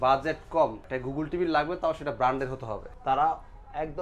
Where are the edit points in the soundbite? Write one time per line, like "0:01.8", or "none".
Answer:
0:00.9
0:02.8